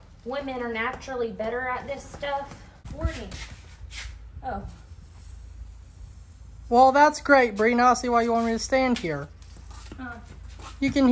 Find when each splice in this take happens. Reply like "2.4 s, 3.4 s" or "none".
2.9 s